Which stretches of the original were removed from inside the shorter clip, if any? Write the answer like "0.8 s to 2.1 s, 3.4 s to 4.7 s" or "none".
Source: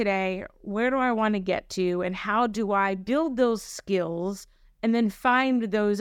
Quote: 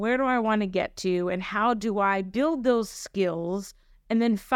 none